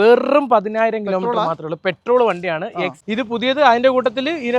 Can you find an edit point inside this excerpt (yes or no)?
yes